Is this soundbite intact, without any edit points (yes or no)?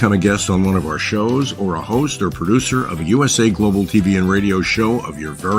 yes